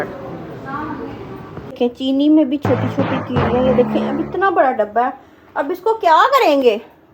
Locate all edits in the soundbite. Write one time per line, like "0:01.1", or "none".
0:01.7